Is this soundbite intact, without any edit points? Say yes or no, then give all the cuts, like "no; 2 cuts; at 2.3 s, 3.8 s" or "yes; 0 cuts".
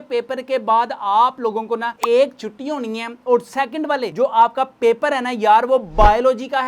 yes; 0 cuts